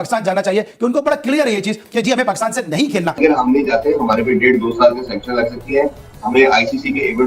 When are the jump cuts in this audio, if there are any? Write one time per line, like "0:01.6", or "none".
0:03.2